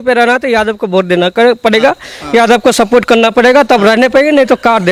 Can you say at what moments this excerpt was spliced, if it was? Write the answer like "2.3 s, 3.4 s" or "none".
none

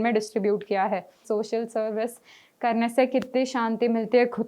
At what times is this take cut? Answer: 1.2 s

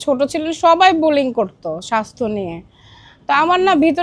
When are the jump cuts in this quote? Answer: none

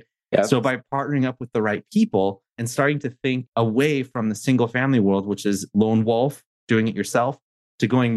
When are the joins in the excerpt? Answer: 0.8 s, 2.6 s, 3.5 s

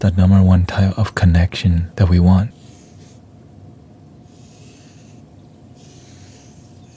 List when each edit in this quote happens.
1.9 s, 2.5 s

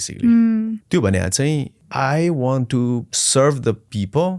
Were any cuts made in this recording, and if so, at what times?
0.8 s, 1.8 s, 3.2 s

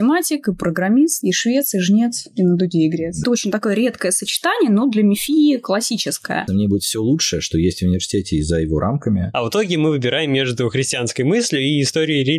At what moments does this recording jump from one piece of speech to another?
3.2 s, 6.4 s, 9.3 s

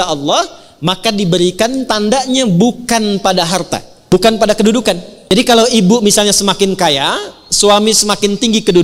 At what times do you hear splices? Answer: 4.1 s, 5.1 s

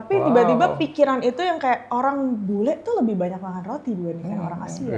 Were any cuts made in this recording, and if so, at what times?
none

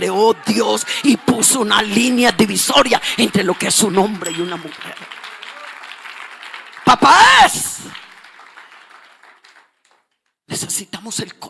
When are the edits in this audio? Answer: none

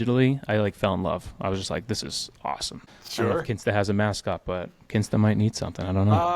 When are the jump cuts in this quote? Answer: 2.7 s

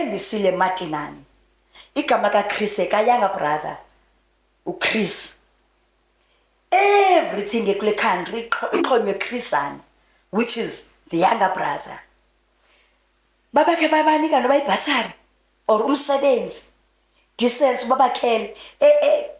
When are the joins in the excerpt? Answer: none

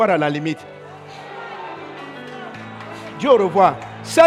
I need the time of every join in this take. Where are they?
none

